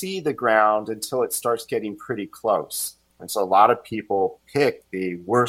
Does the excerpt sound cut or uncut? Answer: cut